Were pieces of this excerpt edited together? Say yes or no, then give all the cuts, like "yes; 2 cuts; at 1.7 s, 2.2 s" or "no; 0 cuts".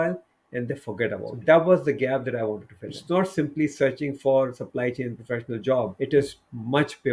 yes; 3 cuts; at 1.3 s, 3.0 s, 5.9 s